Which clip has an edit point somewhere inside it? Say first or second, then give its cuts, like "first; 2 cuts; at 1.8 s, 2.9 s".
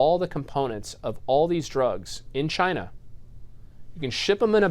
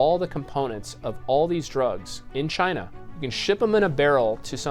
second; 1 cut; at 3.0 s